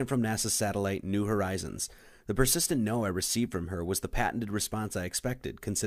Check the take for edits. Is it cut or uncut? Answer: uncut